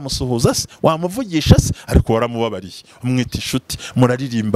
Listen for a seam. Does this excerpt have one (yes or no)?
no